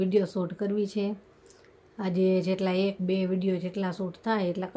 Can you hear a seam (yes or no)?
no